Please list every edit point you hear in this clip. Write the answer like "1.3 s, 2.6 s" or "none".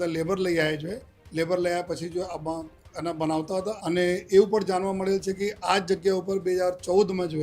3.8 s